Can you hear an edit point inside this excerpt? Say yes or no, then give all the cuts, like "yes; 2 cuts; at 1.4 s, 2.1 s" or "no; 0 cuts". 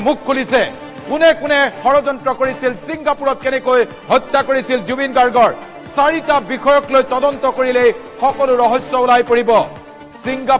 no; 0 cuts